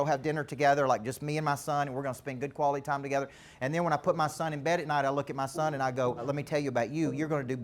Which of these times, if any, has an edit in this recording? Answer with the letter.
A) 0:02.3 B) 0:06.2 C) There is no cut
B